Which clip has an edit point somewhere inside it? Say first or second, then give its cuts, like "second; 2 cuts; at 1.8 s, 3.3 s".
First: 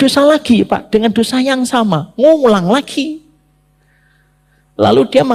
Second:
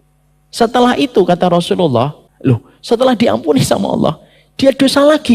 second; 1 cut; at 2.2 s